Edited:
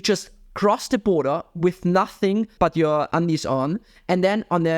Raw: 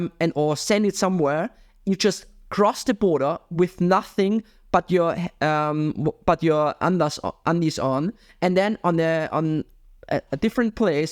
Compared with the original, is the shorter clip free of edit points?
no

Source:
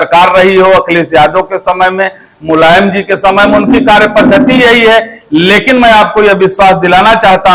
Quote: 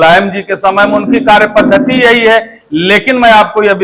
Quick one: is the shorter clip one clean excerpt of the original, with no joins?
yes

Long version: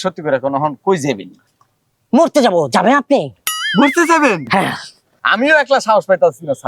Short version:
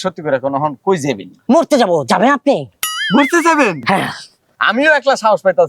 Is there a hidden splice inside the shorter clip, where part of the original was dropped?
yes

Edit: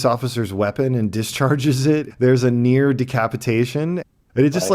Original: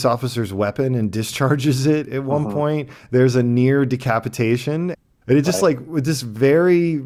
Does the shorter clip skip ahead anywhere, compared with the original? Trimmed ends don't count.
yes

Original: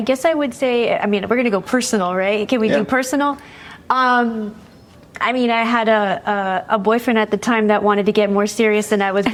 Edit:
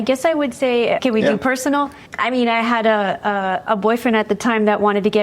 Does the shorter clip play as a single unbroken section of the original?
no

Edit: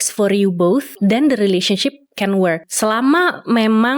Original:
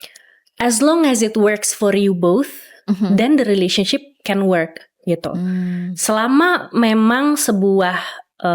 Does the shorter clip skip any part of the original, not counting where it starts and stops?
yes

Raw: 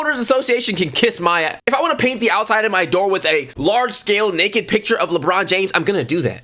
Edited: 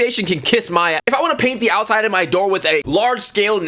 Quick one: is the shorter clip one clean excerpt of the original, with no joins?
no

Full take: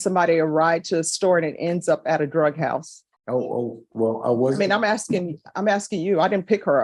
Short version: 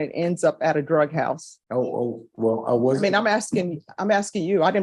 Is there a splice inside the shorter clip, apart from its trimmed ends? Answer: yes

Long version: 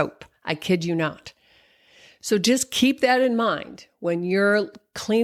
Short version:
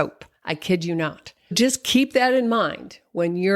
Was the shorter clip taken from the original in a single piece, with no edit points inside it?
no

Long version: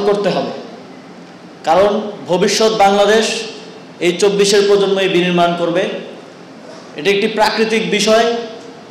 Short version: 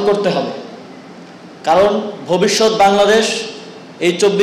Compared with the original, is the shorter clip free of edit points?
yes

